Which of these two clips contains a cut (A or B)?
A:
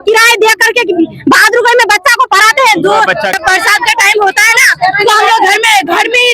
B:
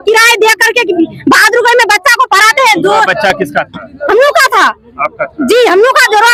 A